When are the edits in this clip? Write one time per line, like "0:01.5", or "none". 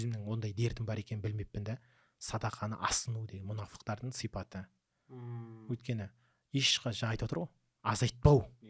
none